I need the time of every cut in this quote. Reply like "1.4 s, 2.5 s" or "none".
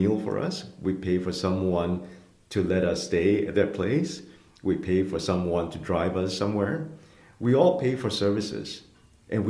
none